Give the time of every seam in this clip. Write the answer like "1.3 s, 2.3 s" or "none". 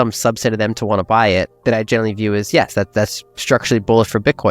1.5 s